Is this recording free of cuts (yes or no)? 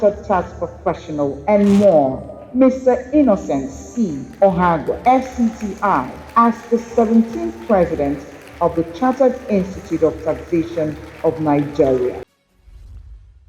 no